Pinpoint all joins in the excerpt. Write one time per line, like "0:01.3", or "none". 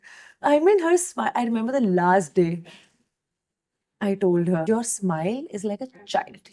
0:04.6